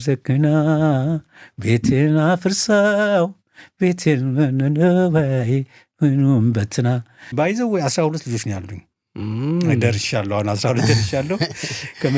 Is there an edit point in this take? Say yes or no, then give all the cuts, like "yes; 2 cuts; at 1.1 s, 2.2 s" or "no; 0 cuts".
yes; 1 cut; at 7.3 s